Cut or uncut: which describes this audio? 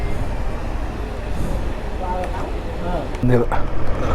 cut